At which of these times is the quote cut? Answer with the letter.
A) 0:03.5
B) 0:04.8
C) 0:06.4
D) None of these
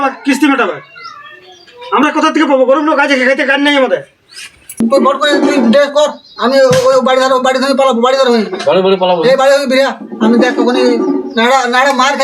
B